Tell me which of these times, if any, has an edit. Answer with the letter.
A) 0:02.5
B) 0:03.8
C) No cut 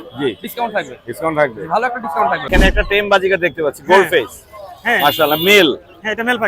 A